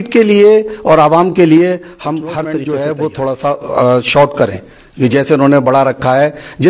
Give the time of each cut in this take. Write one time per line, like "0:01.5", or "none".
0:02.3